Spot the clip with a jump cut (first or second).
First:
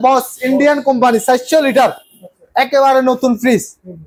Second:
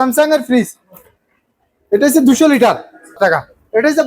second